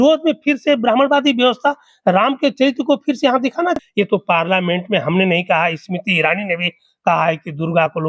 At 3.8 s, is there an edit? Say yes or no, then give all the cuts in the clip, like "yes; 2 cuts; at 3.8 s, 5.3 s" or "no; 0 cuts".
yes; 1 cut; at 3.8 s